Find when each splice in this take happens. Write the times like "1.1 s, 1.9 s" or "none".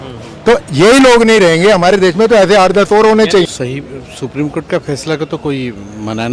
3.5 s